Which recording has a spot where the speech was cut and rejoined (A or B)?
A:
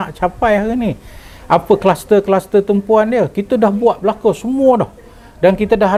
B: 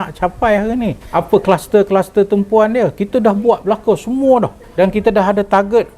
B